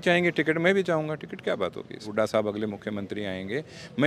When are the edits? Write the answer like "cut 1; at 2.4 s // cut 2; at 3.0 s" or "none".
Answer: cut 1; at 2.1 s